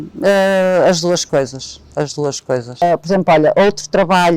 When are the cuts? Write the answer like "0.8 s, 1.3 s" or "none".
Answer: 2.8 s